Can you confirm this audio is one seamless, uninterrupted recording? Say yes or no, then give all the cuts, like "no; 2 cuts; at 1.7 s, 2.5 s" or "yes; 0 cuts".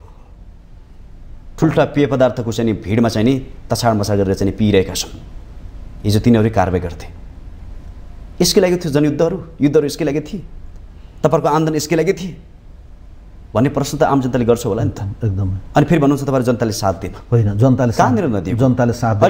yes; 0 cuts